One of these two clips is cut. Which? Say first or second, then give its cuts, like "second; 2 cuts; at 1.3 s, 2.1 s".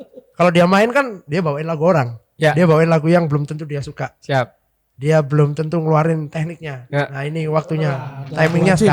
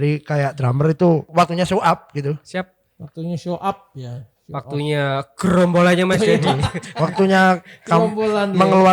second; 1 cut; at 1.3 s